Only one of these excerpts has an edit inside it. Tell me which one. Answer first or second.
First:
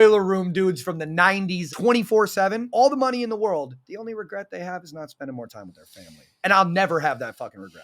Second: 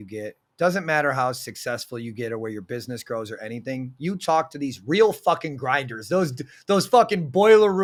first